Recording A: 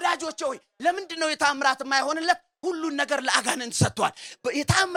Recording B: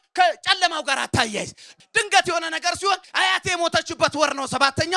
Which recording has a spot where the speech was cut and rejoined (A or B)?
B